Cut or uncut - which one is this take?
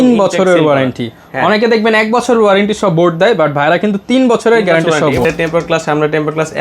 cut